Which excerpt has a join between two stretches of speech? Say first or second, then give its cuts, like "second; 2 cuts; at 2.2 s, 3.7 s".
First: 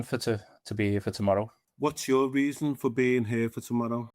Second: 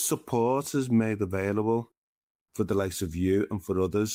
first; 1 cut; at 1.6 s